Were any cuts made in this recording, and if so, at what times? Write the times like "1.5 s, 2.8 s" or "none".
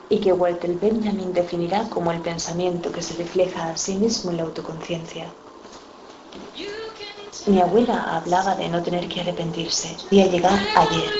none